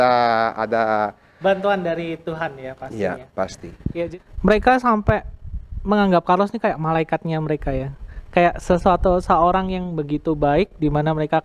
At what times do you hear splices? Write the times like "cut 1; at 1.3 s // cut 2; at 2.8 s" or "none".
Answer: cut 1; at 4.0 s